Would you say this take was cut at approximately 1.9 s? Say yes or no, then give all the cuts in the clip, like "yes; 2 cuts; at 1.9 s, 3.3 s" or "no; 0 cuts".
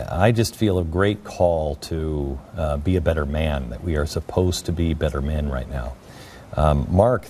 yes; 1 cut; at 1.9 s